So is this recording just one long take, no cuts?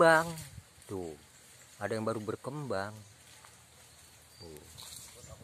yes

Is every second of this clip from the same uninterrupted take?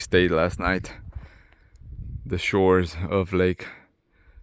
yes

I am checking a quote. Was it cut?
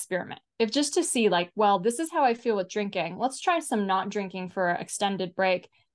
no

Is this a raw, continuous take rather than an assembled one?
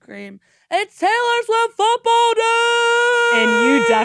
yes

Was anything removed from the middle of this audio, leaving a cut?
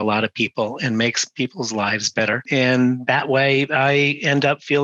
yes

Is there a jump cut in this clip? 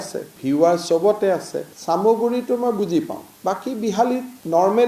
no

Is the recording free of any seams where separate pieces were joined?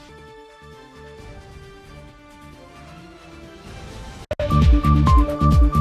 no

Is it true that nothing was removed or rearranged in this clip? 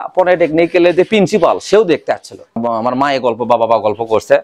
no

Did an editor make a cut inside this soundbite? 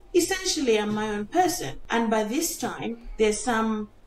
yes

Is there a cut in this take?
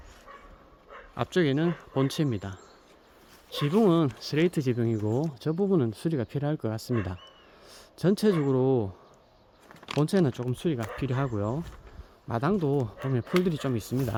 no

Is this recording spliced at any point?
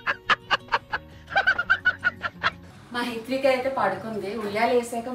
yes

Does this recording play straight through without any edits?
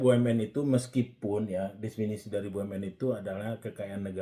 yes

